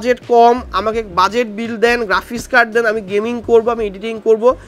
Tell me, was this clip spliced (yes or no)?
no